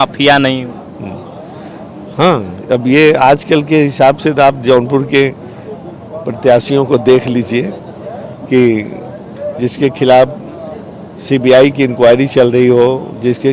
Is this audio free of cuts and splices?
yes; 0 cuts

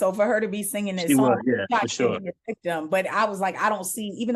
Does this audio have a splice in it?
no; 0 cuts

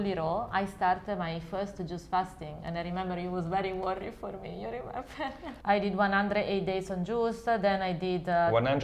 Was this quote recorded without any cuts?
no; 1 cut; at 5.5 s

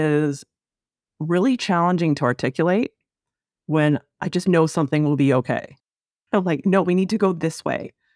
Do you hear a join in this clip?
no; 0 cuts

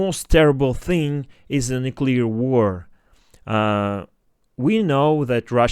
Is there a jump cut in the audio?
no; 0 cuts

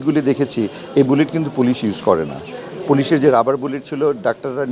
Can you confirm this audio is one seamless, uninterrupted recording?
yes; 0 cuts

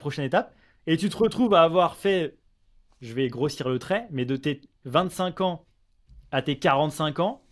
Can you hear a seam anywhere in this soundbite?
no; 0 cuts

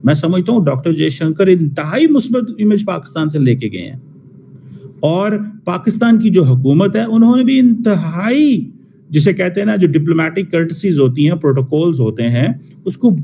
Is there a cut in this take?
no; 0 cuts

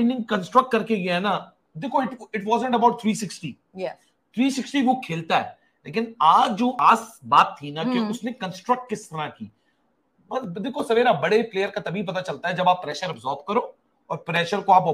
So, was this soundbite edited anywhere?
no; 0 cuts

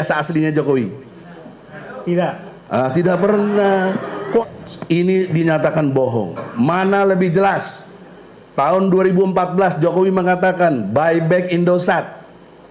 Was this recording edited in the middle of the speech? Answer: yes; 1 cut; at 4.4 s

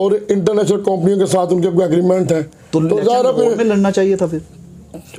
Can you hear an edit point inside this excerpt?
no; 0 cuts

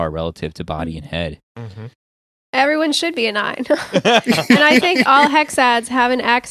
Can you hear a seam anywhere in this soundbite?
yes; 1 cut; at 2.3 s

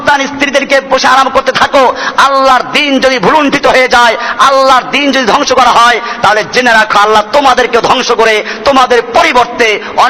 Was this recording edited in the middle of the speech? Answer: no; 0 cuts

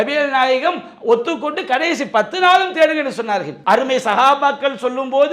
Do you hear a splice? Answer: yes; 1 cut; at 3.5 s

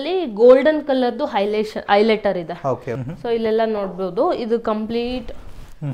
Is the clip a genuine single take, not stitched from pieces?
no; 1 cut; at 3.0 s

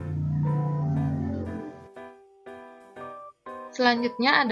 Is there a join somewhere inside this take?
yes; 2 cuts; at 1.8 s, 3.6 s

